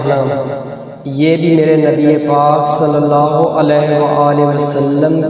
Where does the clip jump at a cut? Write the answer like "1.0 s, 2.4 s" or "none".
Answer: none